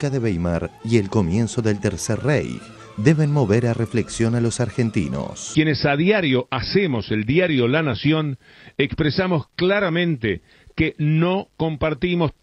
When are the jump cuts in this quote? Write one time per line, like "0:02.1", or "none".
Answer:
0:05.3